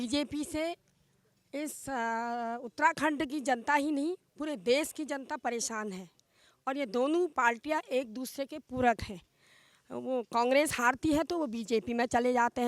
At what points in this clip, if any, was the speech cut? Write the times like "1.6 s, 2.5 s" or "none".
none